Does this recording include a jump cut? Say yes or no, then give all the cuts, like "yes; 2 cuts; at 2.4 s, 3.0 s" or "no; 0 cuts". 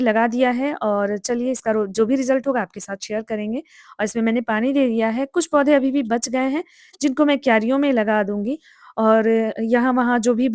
no; 0 cuts